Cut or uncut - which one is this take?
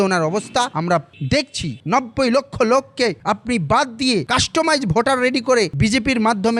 cut